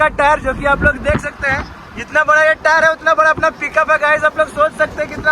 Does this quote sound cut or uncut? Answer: uncut